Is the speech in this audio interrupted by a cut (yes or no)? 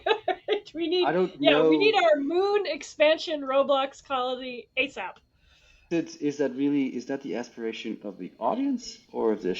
yes